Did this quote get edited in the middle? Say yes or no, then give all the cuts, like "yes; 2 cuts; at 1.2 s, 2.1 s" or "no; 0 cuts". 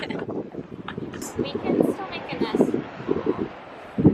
yes; 1 cut; at 1.2 s